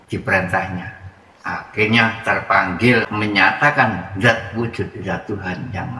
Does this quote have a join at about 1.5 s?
no; 1 cut; at 3.1 s

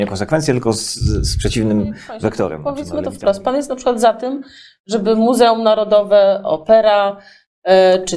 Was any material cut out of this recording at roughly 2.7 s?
yes; 1 cut; at 2.7 s

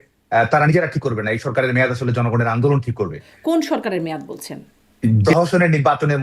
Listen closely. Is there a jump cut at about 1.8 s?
no; 2 cuts; at 3.3 s, 5.2 s

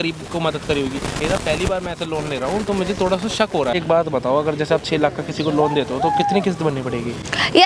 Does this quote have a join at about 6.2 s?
no; 2 cuts; at 1.2 s, 3.7 s

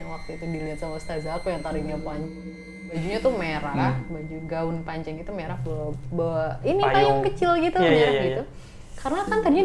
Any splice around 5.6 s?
no; 1 cut; at 2.6 s

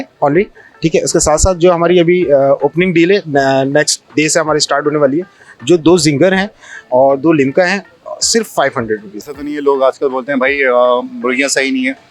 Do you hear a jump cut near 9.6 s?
yes; 1 cut; at 9.6 s

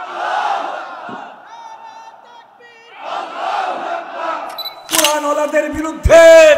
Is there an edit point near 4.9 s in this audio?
yes; 1 cut; at 4.9 s

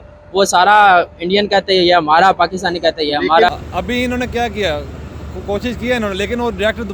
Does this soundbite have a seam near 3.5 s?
yes; 1 cut; at 3.5 s

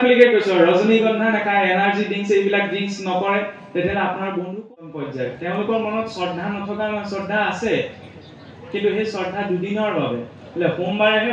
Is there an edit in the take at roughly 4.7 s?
yes; 1 cut; at 4.7 s

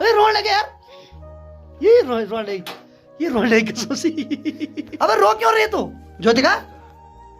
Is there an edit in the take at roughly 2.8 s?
no; 2 cuts; at 4.8 s, 6.0 s

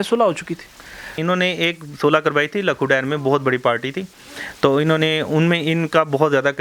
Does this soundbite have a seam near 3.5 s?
no; 1 cut; at 1.2 s

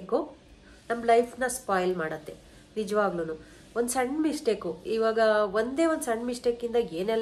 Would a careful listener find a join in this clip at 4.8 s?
no; 0 cuts

